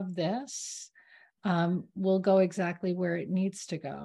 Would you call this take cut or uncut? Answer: uncut